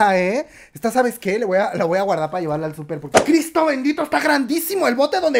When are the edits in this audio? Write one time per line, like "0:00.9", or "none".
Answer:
0:03.2